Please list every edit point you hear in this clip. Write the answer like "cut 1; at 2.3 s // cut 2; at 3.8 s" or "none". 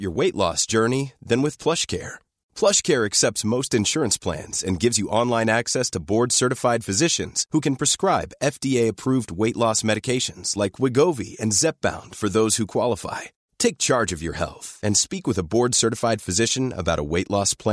none